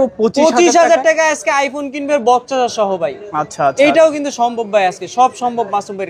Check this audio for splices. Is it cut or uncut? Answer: uncut